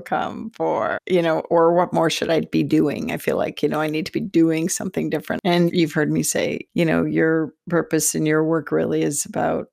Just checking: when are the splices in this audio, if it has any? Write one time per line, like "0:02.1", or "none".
0:05.3